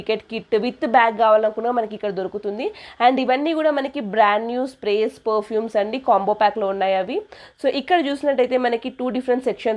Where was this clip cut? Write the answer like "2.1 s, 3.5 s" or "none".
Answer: none